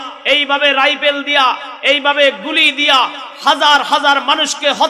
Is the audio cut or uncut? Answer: uncut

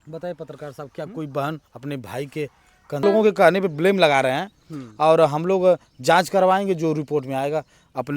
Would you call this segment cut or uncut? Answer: cut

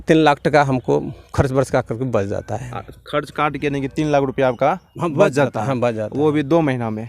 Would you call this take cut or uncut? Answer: uncut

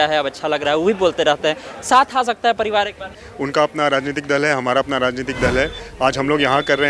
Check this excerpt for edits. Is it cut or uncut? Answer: cut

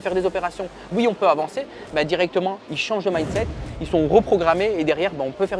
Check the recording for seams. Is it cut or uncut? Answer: uncut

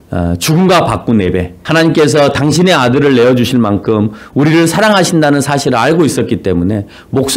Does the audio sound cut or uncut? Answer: cut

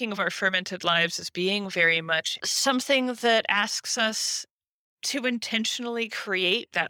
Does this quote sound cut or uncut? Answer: uncut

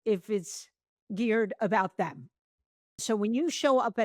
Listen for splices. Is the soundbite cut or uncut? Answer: cut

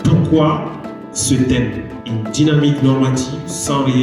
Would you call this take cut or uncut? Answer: cut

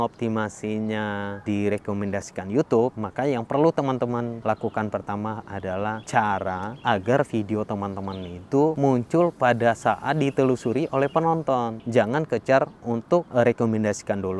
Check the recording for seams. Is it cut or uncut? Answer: cut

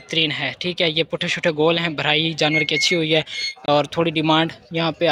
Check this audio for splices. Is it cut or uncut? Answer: uncut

